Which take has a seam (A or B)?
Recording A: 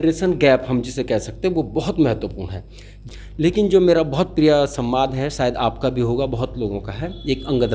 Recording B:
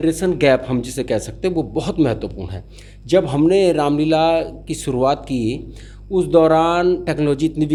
A